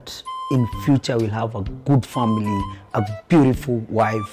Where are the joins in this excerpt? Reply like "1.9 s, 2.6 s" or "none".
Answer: none